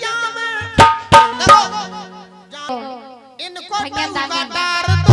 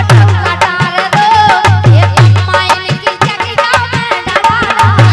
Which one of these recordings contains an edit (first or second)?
first